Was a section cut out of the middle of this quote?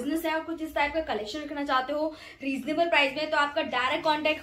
no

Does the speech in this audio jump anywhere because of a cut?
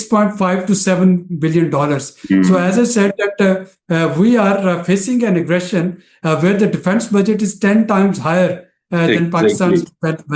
no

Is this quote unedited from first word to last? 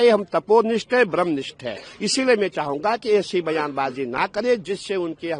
yes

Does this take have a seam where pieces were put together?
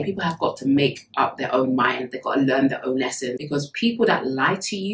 yes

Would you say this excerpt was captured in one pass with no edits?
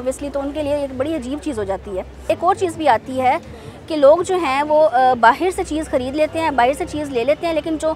yes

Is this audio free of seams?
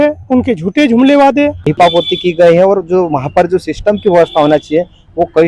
no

